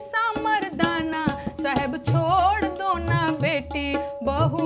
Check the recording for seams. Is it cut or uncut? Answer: uncut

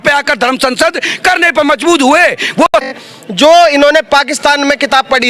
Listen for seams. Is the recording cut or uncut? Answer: cut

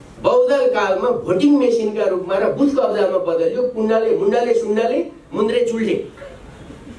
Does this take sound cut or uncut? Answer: uncut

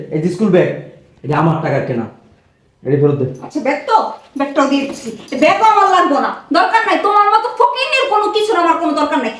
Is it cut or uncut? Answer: uncut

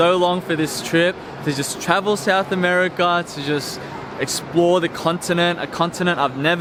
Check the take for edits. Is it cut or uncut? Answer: uncut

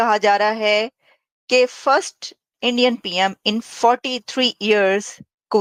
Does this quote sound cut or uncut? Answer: uncut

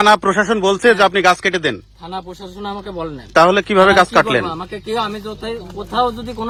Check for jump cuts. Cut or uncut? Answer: uncut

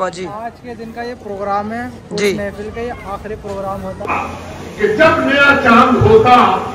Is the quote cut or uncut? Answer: cut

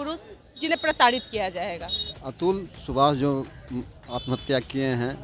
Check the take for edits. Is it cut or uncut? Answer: cut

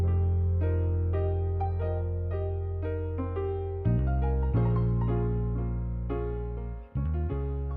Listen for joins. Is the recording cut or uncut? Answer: uncut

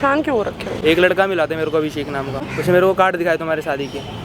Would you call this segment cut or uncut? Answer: cut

